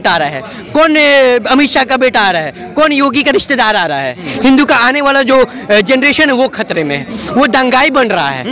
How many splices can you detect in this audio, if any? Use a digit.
1